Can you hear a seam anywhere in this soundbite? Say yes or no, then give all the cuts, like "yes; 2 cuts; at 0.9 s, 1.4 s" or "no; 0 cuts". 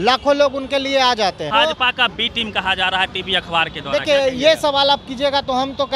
yes; 1 cut; at 1.5 s